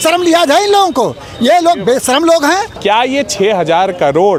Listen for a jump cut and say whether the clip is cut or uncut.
uncut